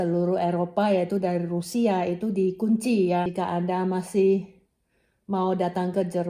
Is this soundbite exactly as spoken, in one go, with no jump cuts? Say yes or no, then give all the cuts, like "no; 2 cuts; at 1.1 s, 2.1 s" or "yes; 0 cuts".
no; 1 cut; at 3.3 s